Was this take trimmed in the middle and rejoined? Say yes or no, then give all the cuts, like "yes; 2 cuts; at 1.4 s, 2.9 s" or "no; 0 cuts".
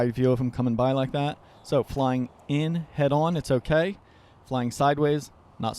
no; 0 cuts